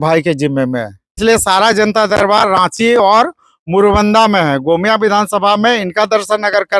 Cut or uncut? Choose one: cut